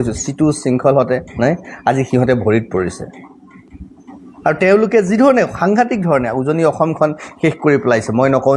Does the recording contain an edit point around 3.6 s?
no; 0 cuts

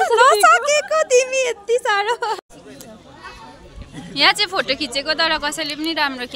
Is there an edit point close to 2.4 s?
yes; 1 cut; at 2.4 s

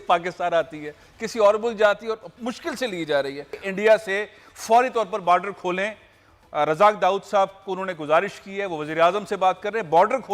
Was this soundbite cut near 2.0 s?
no; 1 cut; at 3.5 s

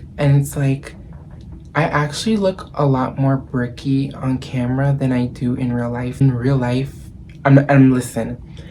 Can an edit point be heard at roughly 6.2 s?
yes; 1 cut; at 6.2 s

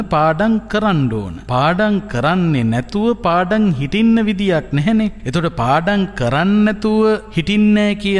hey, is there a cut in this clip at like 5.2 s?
yes; 3 cuts; at 1.3 s, 5.2 s, 7.3 s

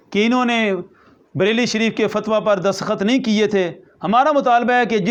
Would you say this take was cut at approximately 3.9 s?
no; 0 cuts

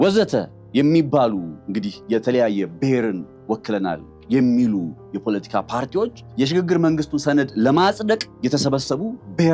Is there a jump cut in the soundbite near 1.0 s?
no; 2 cuts; at 6.2 s, 8.3 s

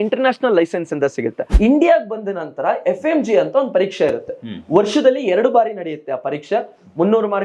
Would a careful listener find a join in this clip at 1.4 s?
yes; 1 cut; at 1.4 s

